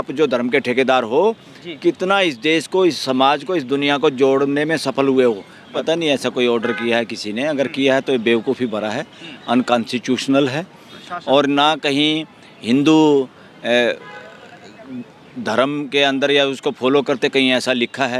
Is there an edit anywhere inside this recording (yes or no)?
yes